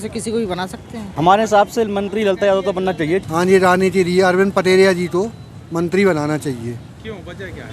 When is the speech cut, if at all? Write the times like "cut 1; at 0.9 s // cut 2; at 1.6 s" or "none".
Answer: cut 1; at 1.0 s // cut 2; at 3.2 s